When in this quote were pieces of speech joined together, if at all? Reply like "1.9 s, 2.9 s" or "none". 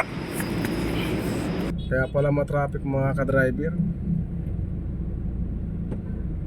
1.7 s